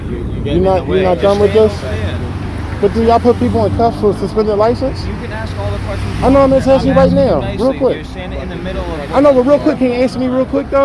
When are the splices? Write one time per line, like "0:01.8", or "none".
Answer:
none